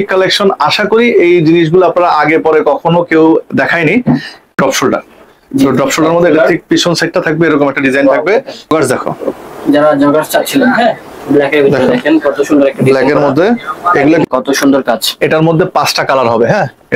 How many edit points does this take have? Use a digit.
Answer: 3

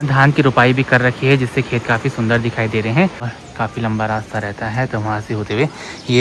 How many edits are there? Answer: 1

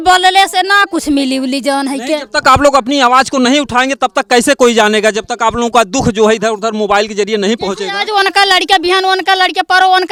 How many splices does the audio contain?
0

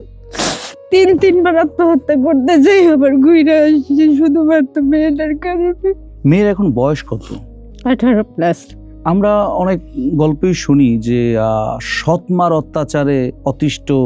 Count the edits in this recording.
0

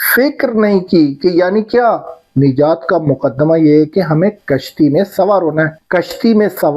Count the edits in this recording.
2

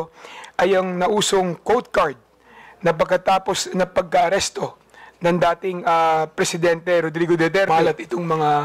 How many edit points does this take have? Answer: 1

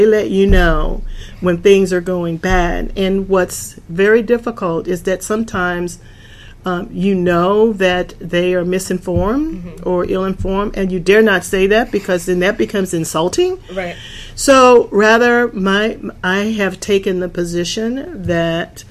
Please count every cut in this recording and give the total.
0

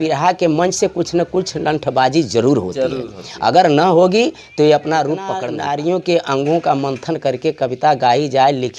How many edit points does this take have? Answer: 1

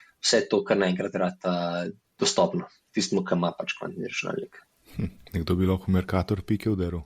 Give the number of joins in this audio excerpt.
1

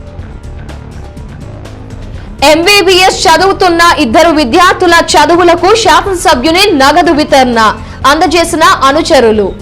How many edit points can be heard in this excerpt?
1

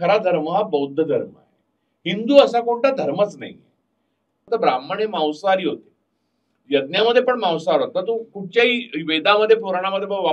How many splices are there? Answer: 1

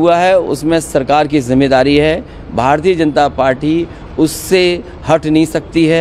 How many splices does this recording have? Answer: 0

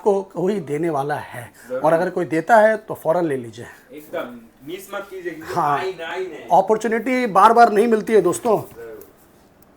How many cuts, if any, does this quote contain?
0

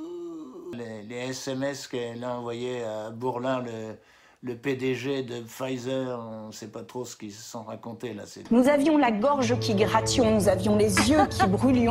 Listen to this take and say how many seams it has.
2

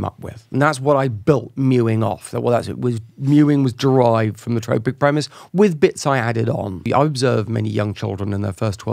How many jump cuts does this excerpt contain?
1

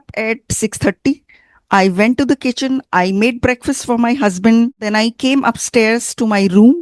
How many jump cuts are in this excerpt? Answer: 1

